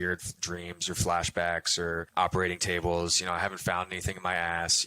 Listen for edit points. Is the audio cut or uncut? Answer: cut